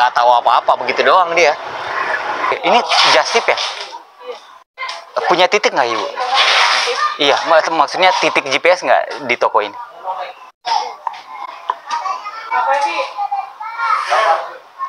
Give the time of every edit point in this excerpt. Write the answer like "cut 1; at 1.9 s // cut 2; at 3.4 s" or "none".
cut 1; at 2.5 s

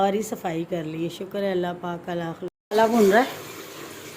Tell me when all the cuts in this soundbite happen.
cut 1; at 2.5 s

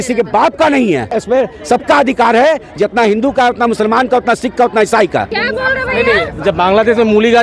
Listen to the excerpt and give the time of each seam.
cut 1; at 1.2 s // cut 2; at 5.3 s

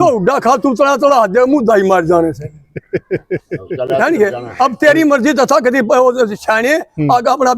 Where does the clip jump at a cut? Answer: none

